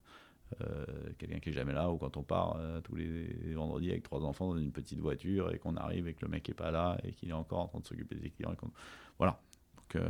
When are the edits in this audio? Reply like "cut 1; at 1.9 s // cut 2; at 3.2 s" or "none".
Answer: none